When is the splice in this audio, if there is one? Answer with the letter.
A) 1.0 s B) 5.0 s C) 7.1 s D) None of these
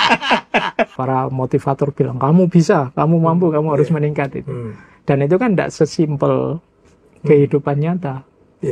A